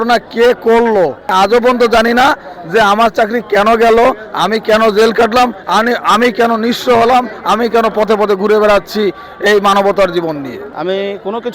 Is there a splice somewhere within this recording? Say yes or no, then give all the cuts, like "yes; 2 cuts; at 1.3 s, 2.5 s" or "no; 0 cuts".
yes; 2 cuts; at 1.3 s, 10.6 s